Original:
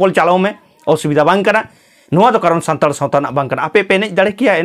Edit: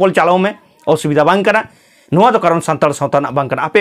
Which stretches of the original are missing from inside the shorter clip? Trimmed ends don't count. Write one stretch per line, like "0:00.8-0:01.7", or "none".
none